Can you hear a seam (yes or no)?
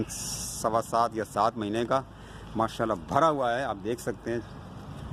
no